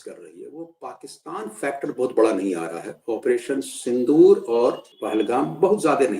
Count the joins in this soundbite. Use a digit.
1